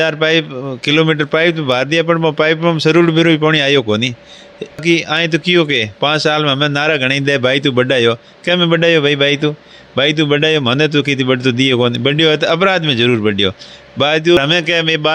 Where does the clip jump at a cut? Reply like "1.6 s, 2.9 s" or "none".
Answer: 4.8 s, 14.4 s